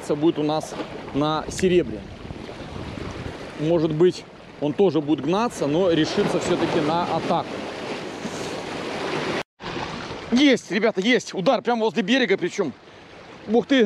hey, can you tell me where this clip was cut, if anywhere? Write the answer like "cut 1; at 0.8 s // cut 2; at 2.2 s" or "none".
none